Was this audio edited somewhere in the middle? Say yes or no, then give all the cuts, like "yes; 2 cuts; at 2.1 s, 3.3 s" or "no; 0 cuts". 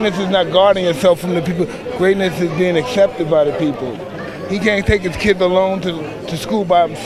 no; 0 cuts